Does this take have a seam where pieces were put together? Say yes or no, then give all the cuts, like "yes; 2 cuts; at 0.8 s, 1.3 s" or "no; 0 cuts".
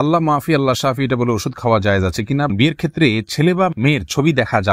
yes; 1 cut; at 2.5 s